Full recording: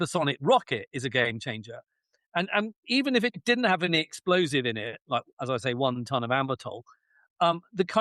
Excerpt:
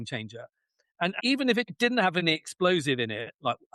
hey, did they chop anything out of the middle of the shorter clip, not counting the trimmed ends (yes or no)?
yes